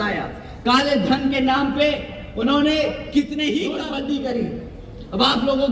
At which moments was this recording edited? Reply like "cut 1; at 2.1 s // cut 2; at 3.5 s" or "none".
cut 1; at 3.8 s